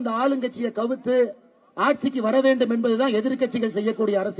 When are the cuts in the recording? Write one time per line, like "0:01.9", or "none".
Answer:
none